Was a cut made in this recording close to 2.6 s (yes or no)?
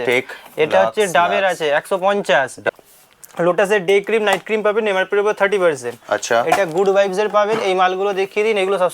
yes